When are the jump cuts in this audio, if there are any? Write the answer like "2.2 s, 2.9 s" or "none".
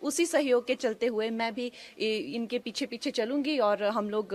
none